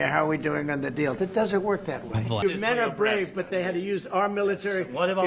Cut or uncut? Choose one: cut